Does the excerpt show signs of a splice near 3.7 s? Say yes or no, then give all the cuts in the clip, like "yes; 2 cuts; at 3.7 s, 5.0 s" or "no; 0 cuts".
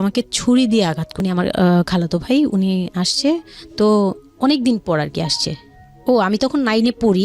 no; 1 cut; at 1.1 s